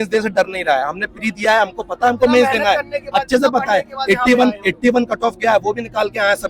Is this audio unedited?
yes; 0 cuts

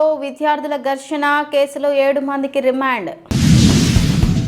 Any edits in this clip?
no; 0 cuts

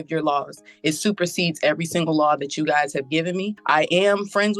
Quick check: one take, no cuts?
no; 1 cut; at 3.6 s

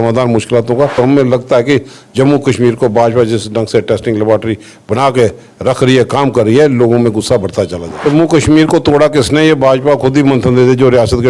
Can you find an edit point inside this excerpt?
yes; 2 cuts; at 1.0 s, 8.0 s

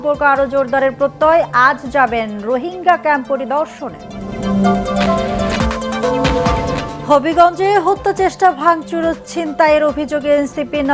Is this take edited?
yes; 1 cut; at 5.5 s

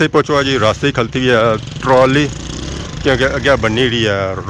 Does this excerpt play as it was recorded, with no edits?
yes; 0 cuts

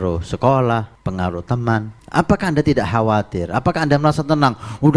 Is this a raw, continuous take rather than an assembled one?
no; 2 cuts; at 1.0 s, 2.0 s

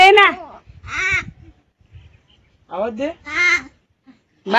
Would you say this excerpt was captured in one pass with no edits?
yes; 0 cuts

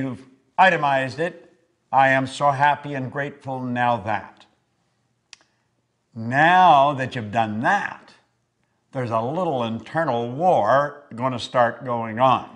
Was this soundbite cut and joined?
no; 0 cuts

